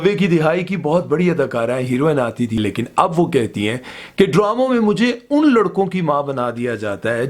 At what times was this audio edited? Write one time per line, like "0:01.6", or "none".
0:02.6